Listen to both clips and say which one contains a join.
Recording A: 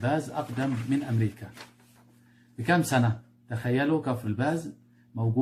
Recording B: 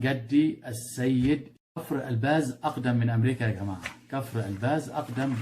B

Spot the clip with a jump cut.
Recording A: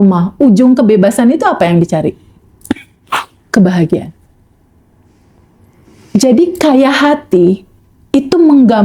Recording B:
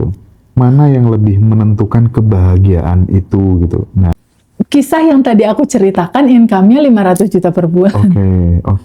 B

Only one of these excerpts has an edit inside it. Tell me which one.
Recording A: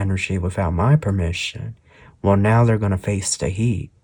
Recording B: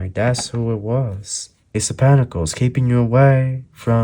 B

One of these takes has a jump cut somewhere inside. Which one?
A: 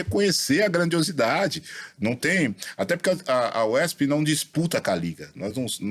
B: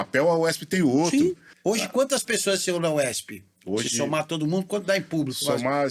B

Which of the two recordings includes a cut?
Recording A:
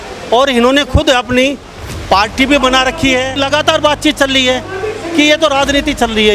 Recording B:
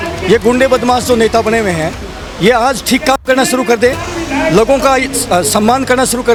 A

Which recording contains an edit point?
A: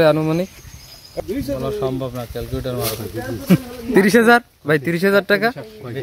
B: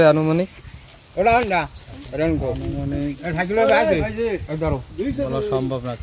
A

